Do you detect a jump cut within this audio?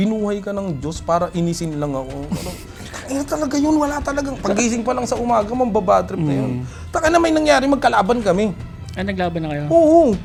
no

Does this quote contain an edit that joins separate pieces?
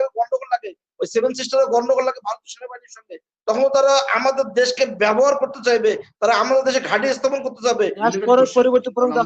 yes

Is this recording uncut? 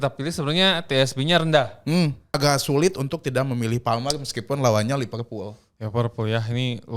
no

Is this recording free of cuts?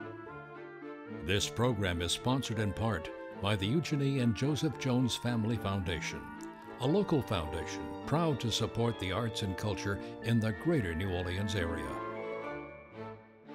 yes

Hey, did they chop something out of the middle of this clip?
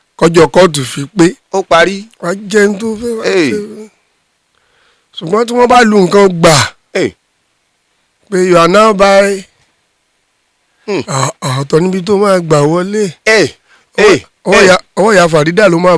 no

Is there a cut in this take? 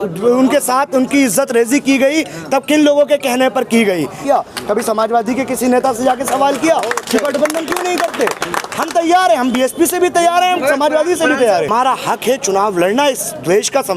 yes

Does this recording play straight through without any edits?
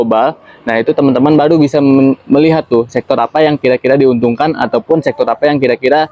yes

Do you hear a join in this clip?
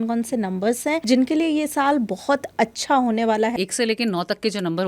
yes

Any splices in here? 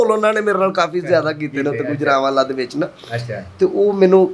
no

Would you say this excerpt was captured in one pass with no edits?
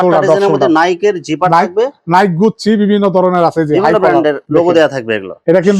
yes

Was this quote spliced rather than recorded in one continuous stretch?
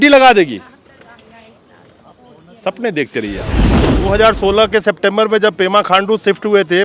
yes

